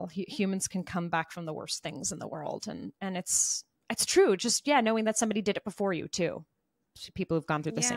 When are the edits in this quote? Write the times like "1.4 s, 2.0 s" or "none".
none